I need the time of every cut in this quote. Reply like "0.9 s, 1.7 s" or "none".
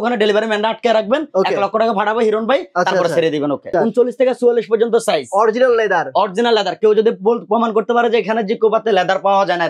3.7 s